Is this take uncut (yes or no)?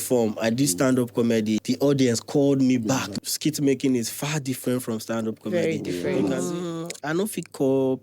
no